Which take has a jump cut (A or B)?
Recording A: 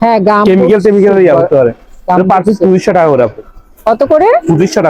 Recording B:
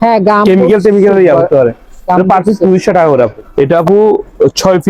B